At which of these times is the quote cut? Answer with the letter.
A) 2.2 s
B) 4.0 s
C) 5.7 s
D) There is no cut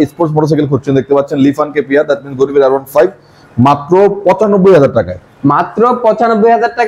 D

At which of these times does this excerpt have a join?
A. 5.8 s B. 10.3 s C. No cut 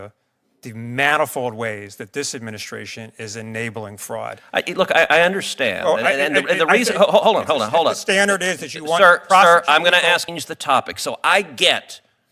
B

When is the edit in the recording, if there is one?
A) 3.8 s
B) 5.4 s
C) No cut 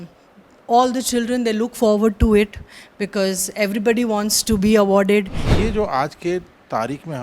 B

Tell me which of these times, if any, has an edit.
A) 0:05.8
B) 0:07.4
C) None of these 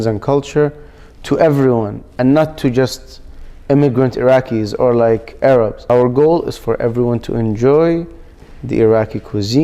A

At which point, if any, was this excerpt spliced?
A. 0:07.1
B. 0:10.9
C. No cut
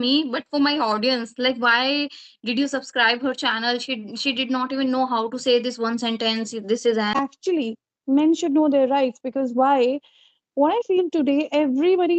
A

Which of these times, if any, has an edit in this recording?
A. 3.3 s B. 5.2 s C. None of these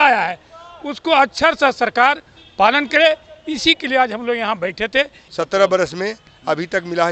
B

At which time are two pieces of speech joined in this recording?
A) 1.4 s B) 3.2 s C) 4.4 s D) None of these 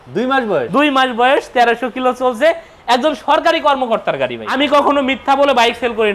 C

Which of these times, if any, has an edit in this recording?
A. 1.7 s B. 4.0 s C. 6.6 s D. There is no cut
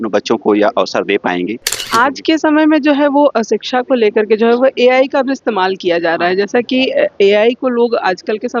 A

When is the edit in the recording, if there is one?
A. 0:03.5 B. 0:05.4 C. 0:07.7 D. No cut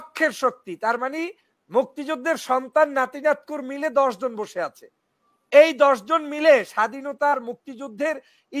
D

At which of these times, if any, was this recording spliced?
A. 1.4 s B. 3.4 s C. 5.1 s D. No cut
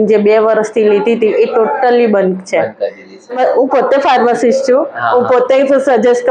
B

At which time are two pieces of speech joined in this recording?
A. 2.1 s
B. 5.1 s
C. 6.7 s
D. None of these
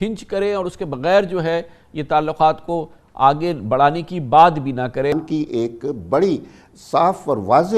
B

